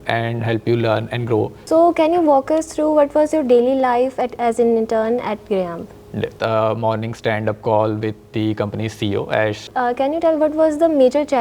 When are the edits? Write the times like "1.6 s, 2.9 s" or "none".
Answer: 1.6 s, 6.3 s, 9.6 s